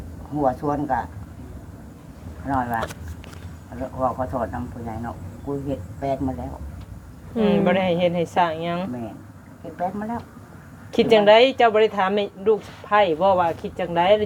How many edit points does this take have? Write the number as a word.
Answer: zero